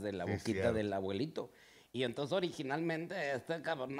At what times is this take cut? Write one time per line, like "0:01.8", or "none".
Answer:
none